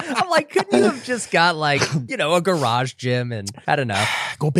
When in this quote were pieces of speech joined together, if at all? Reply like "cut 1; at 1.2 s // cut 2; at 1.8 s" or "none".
cut 1; at 2.0 s // cut 2; at 3.5 s